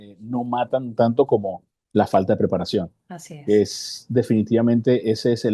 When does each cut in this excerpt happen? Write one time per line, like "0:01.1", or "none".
none